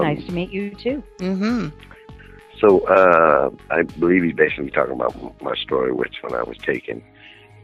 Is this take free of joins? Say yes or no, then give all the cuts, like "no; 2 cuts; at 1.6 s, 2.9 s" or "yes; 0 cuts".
yes; 0 cuts